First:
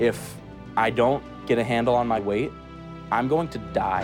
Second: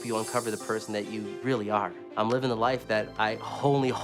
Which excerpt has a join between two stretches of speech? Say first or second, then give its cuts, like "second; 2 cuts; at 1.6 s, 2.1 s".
second; 2 cuts; at 0.9 s, 2.0 s